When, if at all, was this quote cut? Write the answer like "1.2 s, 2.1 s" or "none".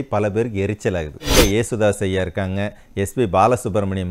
1.4 s

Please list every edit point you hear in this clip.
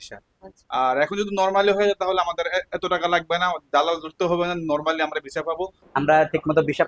5.8 s

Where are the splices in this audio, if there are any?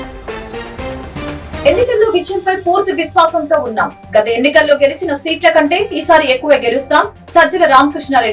1.6 s

